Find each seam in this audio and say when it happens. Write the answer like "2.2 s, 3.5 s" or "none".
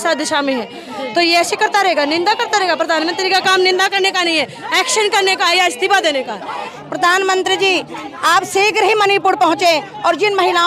6.8 s